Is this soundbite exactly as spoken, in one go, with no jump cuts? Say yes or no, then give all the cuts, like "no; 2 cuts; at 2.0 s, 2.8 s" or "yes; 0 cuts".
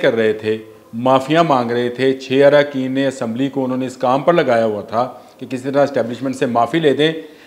yes; 0 cuts